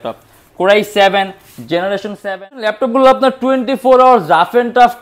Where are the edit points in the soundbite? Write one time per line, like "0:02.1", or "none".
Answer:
0:02.7

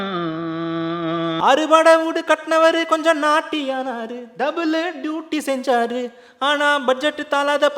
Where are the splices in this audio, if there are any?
0:01.4

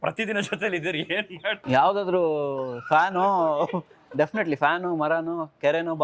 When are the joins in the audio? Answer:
0:01.6

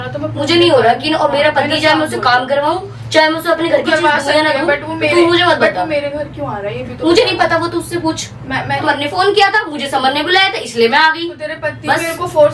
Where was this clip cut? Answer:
0:08.8

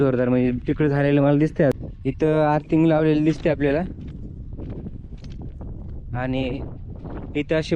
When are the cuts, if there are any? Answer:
0:01.7

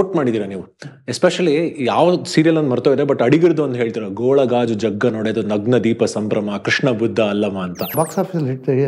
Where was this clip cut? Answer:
0:07.9

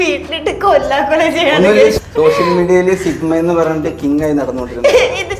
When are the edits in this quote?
0:01.9

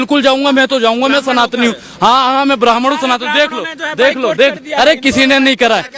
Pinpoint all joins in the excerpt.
none

